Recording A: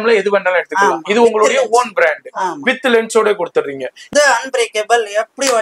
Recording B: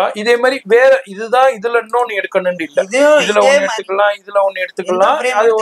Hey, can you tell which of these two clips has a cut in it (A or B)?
A